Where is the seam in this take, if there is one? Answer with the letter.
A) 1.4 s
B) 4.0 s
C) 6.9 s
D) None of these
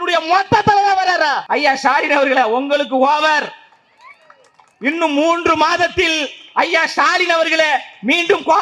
A